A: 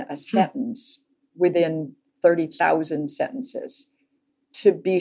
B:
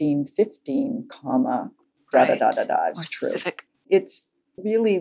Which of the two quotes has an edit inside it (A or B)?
B